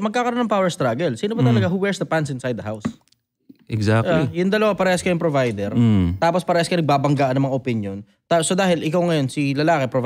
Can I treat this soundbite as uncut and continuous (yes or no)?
yes